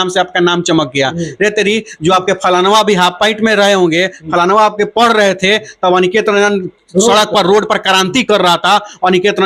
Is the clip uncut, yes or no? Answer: yes